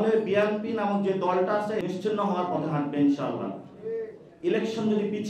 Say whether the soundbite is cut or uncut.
cut